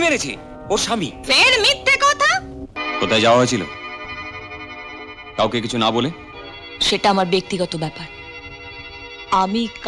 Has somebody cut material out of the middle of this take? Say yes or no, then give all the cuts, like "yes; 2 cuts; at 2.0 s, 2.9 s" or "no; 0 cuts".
yes; 1 cut; at 2.7 s